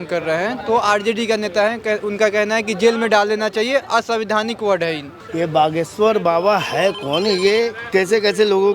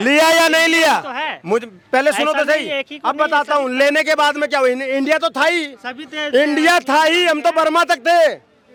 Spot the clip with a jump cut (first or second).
first